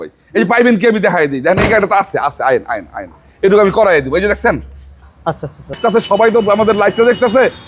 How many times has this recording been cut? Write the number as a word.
one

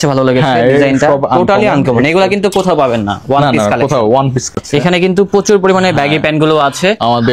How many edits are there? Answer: one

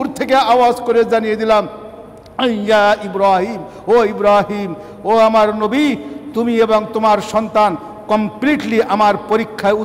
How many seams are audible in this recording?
zero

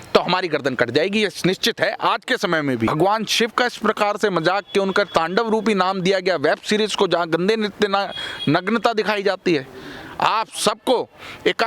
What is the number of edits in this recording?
one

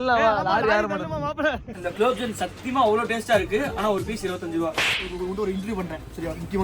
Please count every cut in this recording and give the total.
two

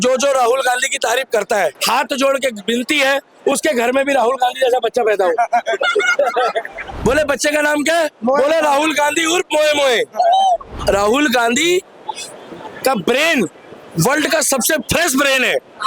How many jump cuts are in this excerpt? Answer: three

